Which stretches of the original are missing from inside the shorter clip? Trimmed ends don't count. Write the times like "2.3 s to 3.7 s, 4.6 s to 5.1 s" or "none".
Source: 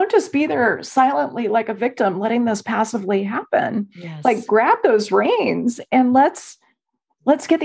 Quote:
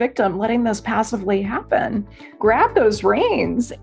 4.1 s to 4.4 s